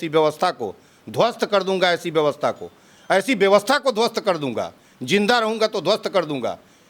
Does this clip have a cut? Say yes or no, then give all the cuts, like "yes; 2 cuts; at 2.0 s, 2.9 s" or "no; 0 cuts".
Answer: no; 0 cuts